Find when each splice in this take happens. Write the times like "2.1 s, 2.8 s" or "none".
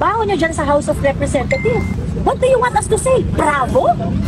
1.9 s